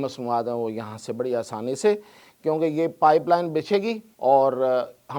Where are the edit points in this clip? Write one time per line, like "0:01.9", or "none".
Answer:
0:04.1